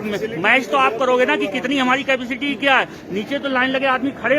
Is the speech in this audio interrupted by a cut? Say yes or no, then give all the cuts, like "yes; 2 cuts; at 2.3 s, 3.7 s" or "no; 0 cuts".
no; 0 cuts